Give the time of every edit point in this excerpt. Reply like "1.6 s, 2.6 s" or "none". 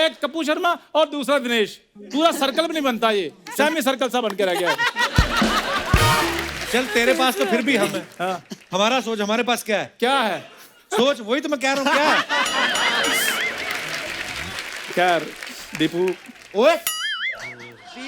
6.6 s